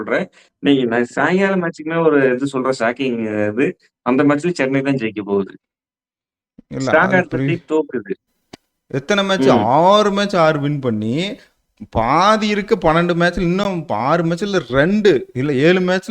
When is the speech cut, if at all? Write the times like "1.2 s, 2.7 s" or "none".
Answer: 8.2 s